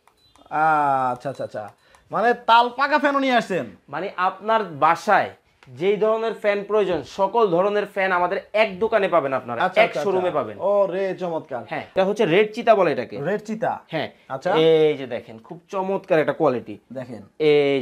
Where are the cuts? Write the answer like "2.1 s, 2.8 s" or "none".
11.9 s